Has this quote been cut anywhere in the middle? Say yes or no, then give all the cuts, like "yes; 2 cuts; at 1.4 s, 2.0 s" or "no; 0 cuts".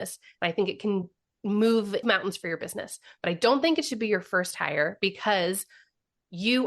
yes; 1 cut; at 2.0 s